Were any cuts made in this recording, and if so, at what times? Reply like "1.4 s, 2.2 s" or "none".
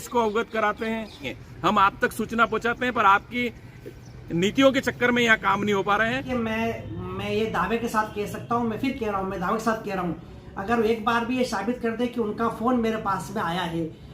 1.3 s, 6.2 s